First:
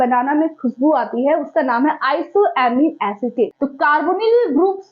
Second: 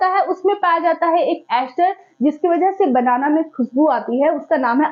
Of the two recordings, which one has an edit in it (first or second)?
first